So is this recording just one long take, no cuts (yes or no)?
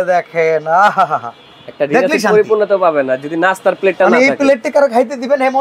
yes